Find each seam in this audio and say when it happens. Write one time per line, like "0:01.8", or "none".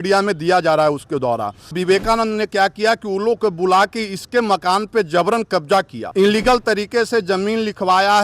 0:01.8
0:06.0